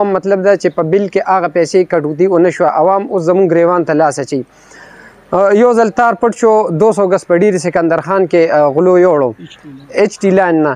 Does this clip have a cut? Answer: no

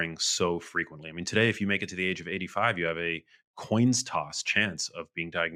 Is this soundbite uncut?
yes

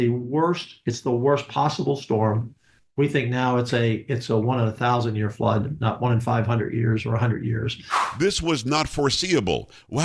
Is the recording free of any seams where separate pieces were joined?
no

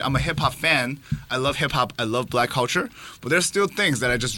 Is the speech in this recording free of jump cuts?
yes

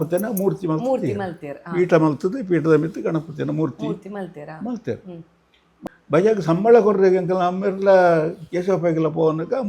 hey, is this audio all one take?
no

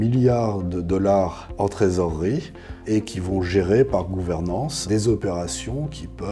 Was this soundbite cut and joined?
yes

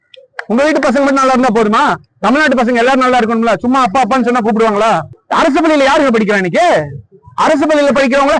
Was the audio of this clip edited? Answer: yes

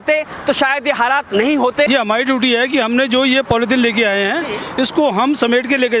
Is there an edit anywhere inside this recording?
yes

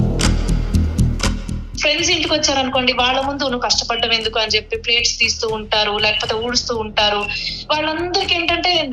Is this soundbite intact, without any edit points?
no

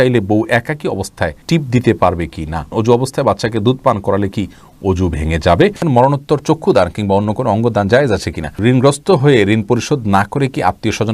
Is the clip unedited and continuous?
no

